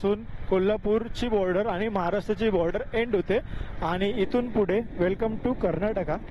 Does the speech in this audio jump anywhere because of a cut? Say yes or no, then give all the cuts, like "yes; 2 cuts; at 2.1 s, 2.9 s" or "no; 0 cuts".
no; 0 cuts